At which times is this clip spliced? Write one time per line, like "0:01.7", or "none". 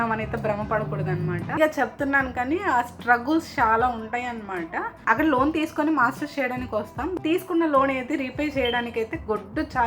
0:01.6

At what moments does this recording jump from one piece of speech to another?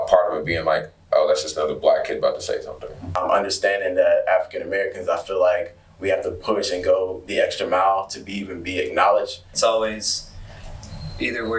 0:03.2
0:09.5

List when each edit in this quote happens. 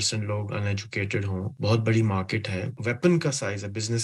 0:01.5
0:02.8

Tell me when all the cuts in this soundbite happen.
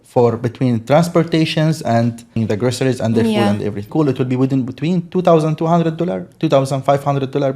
0:02.3
0:03.9

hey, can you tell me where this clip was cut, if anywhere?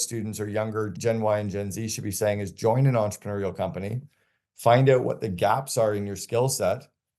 0:00.9

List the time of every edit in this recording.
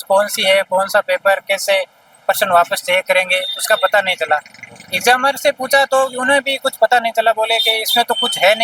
none

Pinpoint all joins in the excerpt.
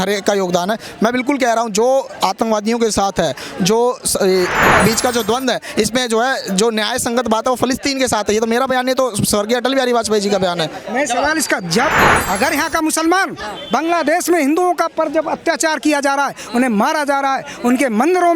0:04.5
0:11.9

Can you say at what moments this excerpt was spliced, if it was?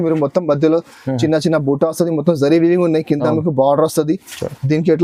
none

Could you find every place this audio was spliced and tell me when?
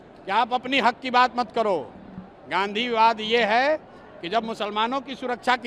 none

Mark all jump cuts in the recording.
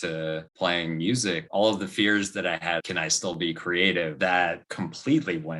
0:01.4
0:02.8
0:04.2

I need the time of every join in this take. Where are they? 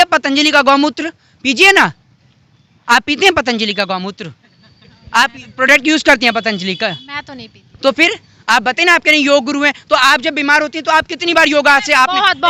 none

